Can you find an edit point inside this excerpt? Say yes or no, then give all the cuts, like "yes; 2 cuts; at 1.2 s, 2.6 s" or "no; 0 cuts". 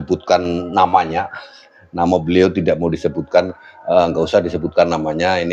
no; 0 cuts